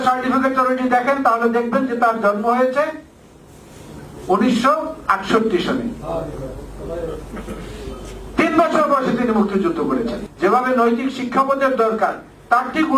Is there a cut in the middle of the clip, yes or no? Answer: yes